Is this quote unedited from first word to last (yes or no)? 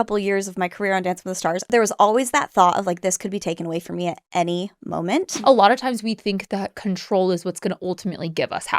no